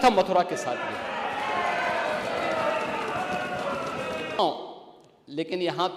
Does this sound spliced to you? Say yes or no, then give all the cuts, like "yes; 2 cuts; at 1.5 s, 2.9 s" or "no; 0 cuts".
yes; 1 cut; at 4.4 s